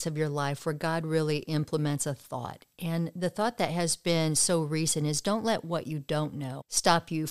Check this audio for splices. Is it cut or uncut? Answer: uncut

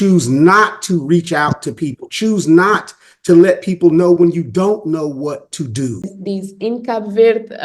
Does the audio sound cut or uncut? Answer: cut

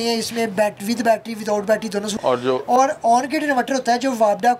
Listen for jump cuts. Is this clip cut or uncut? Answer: cut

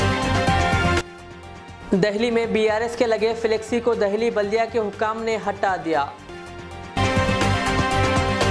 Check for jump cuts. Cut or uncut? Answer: cut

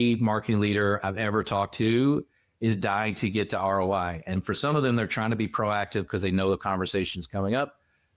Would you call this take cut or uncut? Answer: uncut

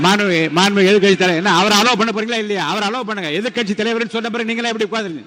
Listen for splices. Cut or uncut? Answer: uncut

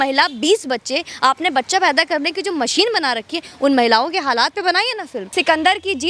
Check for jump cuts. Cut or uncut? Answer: cut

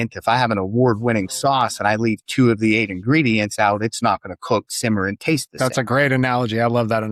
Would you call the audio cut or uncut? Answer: uncut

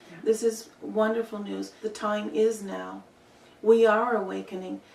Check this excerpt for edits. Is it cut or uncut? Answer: cut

